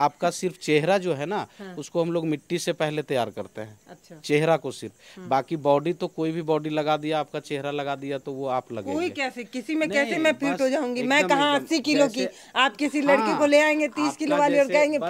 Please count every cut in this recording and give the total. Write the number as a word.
zero